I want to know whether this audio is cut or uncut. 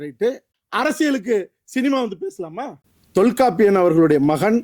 cut